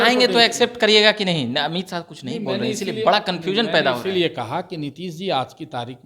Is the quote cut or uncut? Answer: uncut